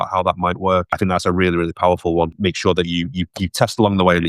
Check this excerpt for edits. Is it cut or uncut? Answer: cut